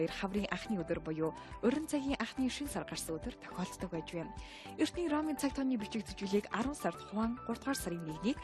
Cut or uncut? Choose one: uncut